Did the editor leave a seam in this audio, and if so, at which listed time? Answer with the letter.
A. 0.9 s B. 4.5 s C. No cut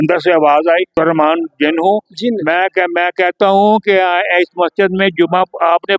A